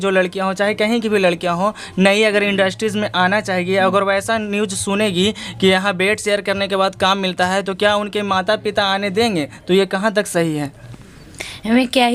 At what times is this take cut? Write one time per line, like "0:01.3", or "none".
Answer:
none

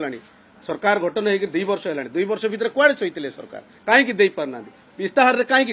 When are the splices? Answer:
none

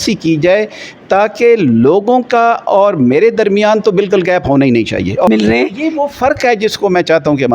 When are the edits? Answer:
0:05.3

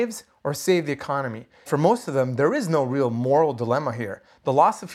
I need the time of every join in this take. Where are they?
0:01.7

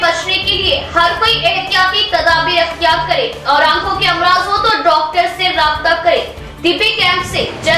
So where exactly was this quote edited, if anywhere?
none

